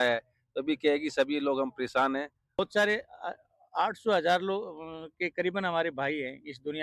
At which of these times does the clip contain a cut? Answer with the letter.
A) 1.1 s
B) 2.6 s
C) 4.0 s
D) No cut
B